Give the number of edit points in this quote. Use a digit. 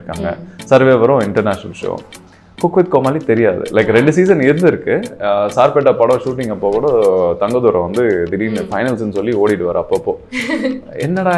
0